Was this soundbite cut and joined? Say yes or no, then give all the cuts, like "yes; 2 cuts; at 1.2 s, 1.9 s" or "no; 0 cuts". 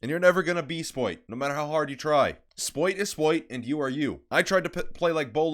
yes; 1 cut; at 1.3 s